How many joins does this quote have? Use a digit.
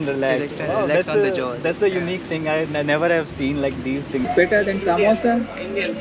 1